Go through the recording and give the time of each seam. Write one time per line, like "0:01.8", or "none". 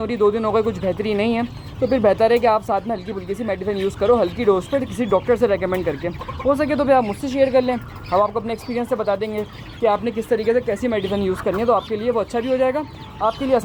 none